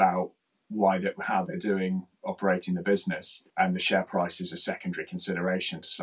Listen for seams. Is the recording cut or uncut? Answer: uncut